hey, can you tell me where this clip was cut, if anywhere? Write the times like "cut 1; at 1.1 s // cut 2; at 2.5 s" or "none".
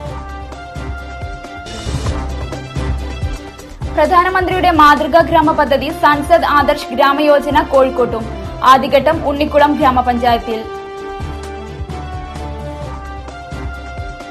cut 1; at 1.6 s

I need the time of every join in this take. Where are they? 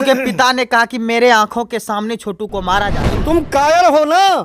cut 1; at 3.1 s

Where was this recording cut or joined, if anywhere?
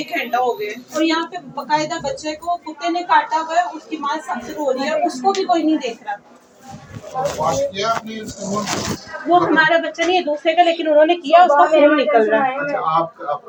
none

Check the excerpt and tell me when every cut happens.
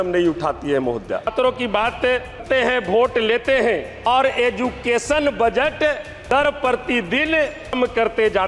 cut 1; at 1.3 s // cut 2; at 2.4 s // cut 3; at 4.1 s // cut 4; at 6.3 s // cut 5; at 7.7 s

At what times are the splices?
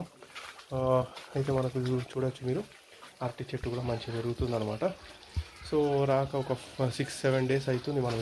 none

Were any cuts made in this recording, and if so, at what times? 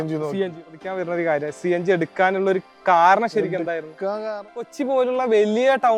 cut 1; at 0.8 s // cut 2; at 4.7 s

